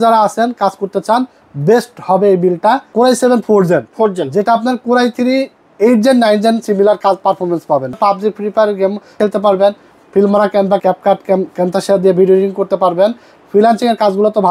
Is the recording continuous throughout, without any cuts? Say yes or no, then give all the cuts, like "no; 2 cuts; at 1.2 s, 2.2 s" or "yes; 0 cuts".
no; 4 cuts; at 2.9 s, 8.0 s, 9.2 s, 10.8 s